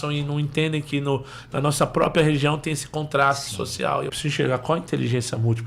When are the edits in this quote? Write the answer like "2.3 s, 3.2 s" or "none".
4.1 s